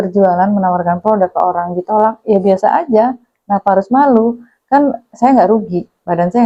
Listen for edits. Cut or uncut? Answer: uncut